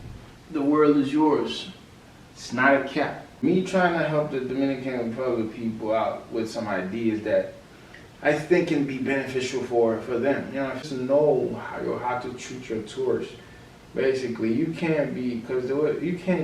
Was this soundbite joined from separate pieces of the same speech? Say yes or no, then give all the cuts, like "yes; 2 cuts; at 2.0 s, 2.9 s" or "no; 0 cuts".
yes; 2 cuts; at 3.2 s, 10.8 s